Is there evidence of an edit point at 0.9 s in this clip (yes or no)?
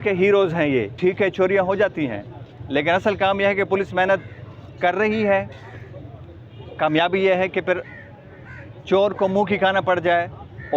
yes